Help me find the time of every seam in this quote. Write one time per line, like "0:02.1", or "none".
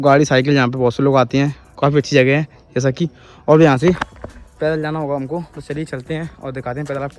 none

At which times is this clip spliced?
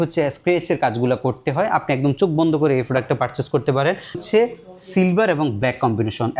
0:04.2

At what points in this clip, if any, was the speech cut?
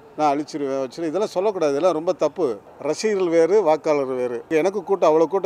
0:02.7
0:04.5

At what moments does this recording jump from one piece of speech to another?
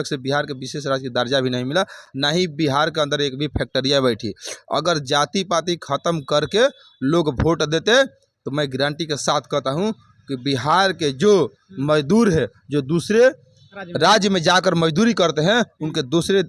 none

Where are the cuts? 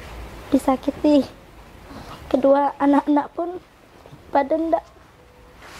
none

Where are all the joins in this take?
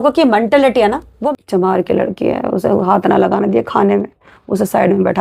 0:01.1

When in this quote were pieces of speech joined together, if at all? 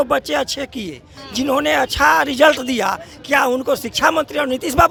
none

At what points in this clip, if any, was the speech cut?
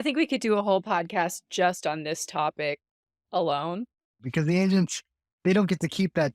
0:04.2

